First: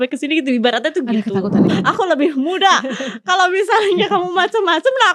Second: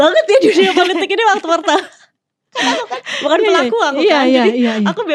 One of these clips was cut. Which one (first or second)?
first